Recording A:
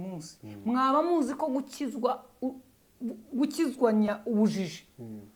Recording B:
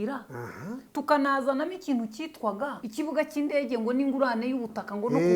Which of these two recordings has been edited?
B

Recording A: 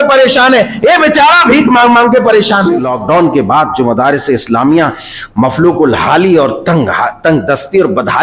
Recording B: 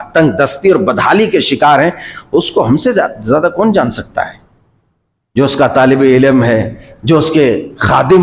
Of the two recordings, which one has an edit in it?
A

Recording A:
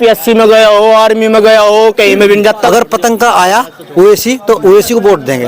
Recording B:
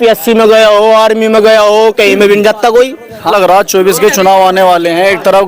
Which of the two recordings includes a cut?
A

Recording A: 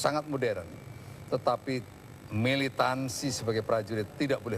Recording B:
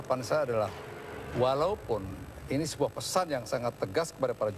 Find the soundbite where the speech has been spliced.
A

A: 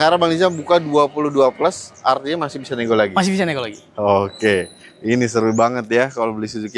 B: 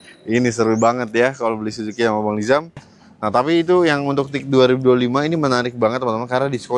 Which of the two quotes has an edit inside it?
B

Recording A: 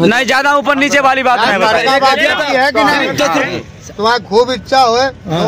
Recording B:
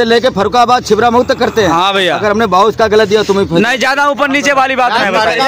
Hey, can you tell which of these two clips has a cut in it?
A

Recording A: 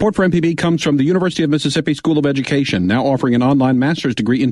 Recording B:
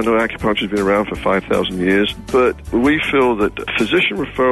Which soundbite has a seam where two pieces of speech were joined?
B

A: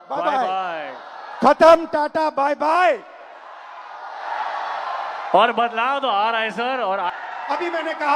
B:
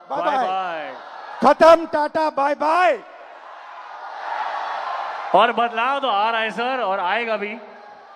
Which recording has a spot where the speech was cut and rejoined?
A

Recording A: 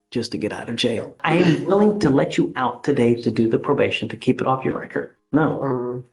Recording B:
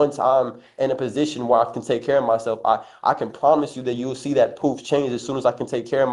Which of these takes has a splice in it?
A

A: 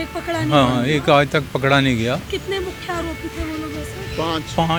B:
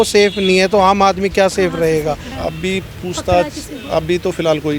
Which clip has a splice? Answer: B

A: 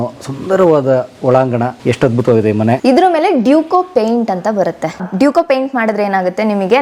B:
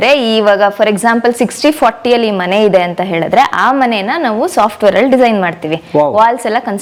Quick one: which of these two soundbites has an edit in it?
A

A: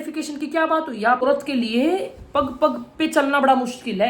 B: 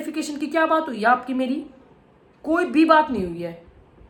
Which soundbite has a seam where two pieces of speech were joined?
A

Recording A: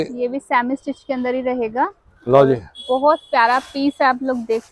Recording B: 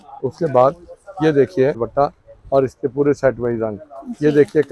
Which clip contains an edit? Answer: B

